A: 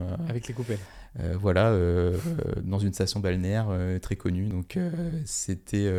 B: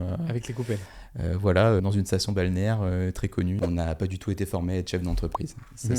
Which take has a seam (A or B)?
B